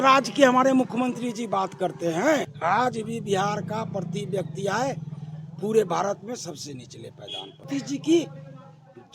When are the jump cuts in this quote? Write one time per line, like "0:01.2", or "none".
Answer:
0:02.5
0:07.6